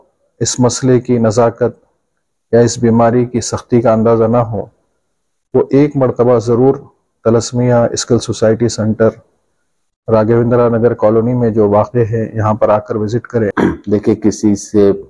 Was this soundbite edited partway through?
yes; 1 cut; at 13.5 s

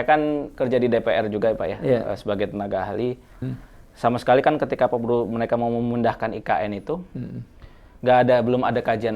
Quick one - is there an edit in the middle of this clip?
yes; 1 cut; at 3.5 s

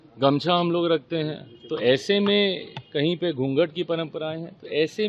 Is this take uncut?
no; 1 cut; at 1.3 s

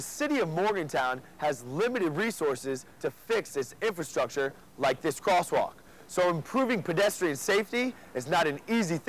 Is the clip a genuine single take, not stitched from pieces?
yes; 0 cuts

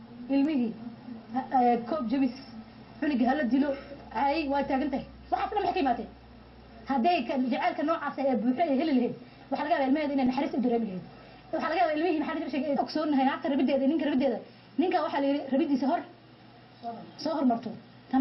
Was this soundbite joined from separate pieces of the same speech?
no; 0 cuts

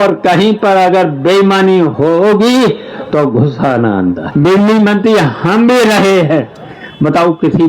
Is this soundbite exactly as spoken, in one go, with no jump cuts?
no; 2 cuts; at 1.9 s, 4.2 s

